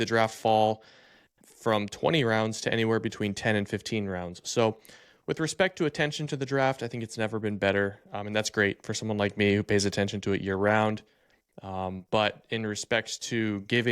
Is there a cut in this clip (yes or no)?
no